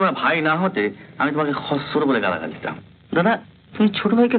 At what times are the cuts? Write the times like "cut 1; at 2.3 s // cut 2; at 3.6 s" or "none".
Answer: none